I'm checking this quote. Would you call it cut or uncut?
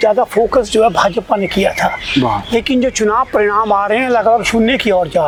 uncut